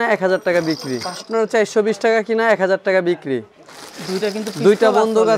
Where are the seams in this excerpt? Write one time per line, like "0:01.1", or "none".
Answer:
0:01.3

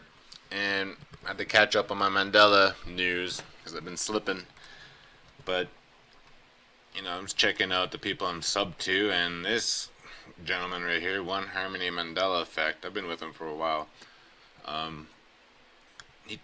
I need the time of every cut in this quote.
none

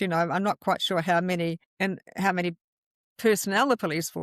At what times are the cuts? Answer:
0:01.7

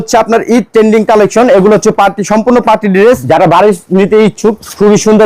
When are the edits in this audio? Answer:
0:03.2

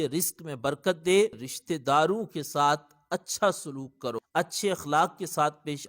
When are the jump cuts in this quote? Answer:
0:01.5
0:04.2

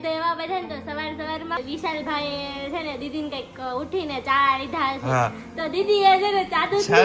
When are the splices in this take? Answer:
0:01.6

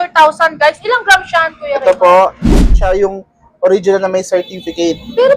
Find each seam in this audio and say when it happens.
0:02.7

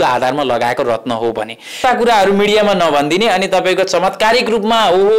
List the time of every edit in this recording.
0:01.8

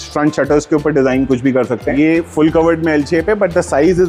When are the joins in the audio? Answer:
0:02.0

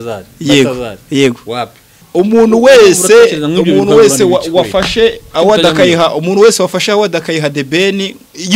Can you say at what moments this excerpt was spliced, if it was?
0:01.9

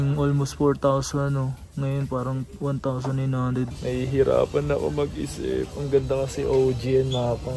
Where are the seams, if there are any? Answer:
0:03.7

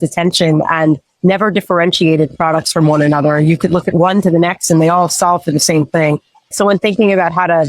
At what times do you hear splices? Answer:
0:06.5

